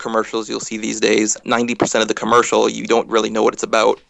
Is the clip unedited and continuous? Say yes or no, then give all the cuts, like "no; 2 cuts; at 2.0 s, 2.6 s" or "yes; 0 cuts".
no; 1 cut; at 1.4 s